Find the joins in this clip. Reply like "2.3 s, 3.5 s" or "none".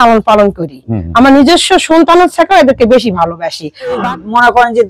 4.0 s